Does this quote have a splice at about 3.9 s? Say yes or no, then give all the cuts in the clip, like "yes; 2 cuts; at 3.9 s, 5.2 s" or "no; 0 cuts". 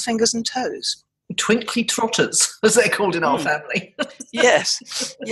no; 0 cuts